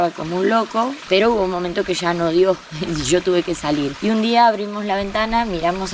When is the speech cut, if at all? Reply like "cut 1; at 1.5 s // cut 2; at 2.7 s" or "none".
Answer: cut 1; at 1.0 s // cut 2; at 3.9 s